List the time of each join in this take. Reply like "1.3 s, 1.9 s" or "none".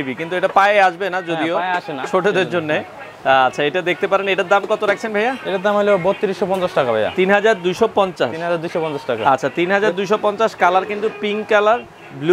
none